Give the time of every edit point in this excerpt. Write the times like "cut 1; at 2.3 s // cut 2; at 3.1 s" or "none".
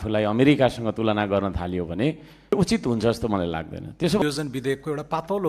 cut 1; at 2.5 s // cut 2; at 4.2 s